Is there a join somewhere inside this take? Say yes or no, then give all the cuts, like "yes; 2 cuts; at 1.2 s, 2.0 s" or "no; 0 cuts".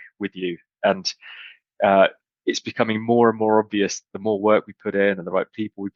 no; 0 cuts